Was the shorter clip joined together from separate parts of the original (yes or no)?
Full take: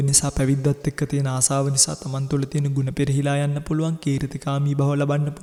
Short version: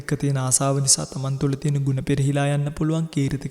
no